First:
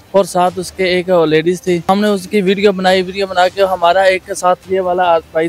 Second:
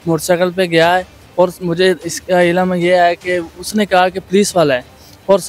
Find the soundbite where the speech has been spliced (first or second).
first